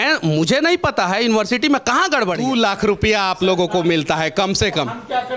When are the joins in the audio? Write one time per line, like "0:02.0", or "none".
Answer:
0:02.4